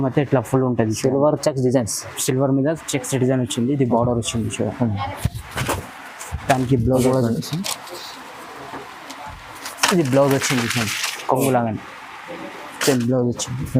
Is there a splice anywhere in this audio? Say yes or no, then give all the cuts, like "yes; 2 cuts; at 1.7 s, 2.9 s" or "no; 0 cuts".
no; 0 cuts